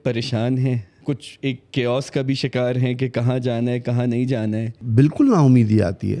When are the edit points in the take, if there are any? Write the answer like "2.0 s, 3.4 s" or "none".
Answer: 0.9 s, 4.7 s